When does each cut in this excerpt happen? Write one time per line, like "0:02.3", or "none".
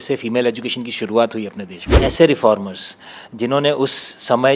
0:02.0